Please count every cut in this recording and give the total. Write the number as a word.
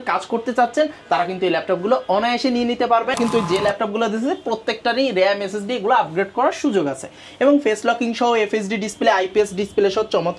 one